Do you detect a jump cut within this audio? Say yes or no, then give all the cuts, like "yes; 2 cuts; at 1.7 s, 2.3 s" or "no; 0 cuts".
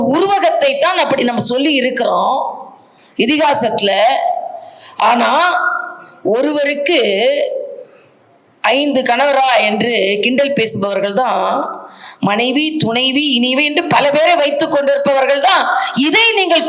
no; 0 cuts